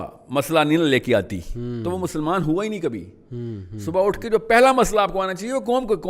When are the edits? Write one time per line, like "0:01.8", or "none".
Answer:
none